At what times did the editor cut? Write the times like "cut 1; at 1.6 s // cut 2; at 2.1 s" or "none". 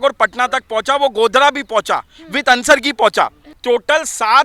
cut 1; at 3.5 s

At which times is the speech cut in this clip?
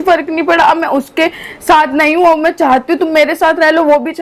none

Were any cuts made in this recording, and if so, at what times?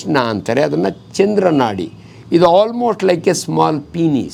none

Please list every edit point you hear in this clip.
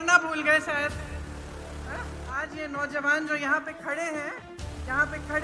cut 1; at 1.0 s // cut 2; at 2.4 s

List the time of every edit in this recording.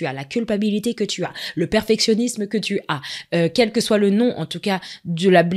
none

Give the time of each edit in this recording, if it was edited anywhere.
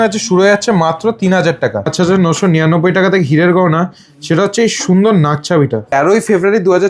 cut 1; at 1.9 s // cut 2; at 5.9 s

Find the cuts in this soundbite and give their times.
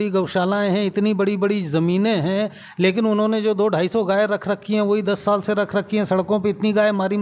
none

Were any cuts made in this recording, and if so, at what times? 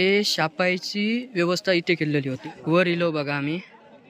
cut 1; at 2.3 s

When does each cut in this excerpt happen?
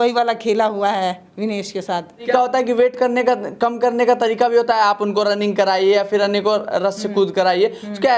cut 1; at 2.3 s

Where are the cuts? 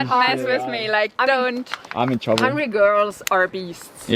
none

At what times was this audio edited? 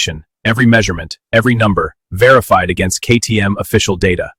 none

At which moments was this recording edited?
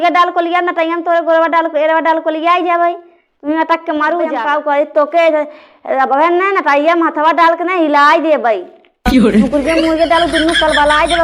cut 1; at 4.3 s // cut 2; at 8.7 s // cut 3; at 9.5 s

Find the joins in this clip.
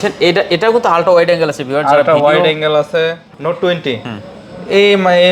cut 1; at 3.3 s

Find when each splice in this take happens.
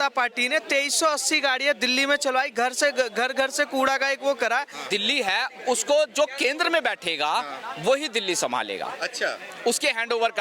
cut 1; at 4.9 s

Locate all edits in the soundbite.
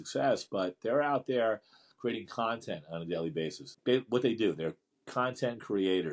cut 1; at 3.7 s

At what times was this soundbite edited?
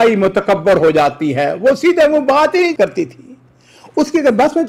none

